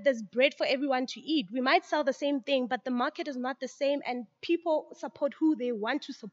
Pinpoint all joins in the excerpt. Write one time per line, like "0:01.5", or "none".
none